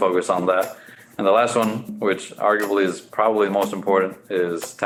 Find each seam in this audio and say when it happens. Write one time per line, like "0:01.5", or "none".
none